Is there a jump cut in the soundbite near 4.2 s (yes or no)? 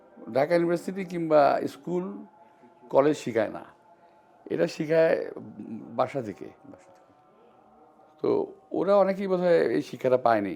no